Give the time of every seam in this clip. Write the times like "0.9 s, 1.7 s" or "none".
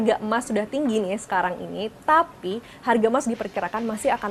none